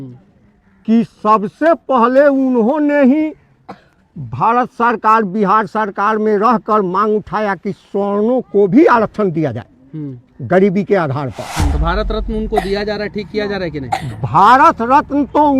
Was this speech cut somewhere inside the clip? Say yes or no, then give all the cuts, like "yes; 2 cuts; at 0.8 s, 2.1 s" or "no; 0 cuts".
yes; 1 cut; at 11.7 s